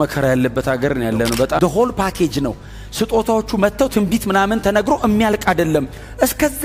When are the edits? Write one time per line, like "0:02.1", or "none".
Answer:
0:01.6